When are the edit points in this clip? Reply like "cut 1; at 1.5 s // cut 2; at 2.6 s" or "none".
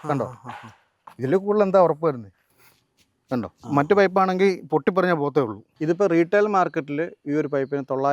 cut 1; at 5.7 s